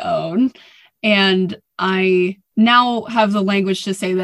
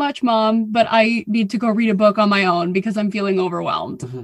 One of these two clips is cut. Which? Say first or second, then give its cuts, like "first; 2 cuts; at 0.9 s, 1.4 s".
first; 1 cut; at 2.4 s